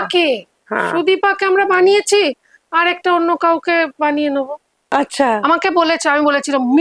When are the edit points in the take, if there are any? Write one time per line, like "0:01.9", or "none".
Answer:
0:04.8